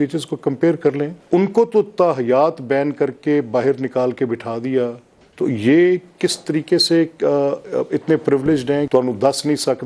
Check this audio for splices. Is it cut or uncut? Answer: cut